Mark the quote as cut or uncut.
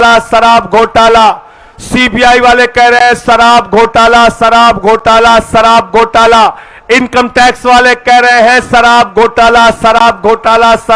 uncut